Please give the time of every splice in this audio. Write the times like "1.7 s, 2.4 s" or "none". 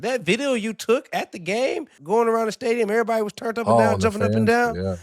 1.9 s